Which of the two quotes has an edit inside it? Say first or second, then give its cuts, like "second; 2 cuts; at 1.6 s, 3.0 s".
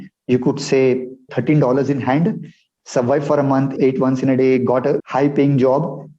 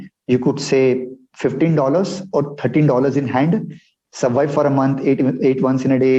first; 3 cuts; at 1.3 s, 3.7 s, 5.0 s